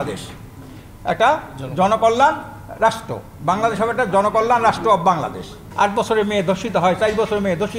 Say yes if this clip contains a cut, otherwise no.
yes